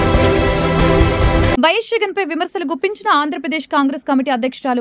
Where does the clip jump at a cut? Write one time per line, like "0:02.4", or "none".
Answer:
0:01.5

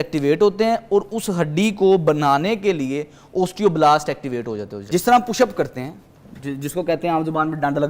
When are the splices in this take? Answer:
0:04.8

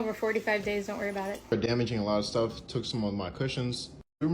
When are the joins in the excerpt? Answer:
0:01.5

